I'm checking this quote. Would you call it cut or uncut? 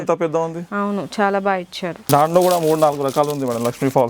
cut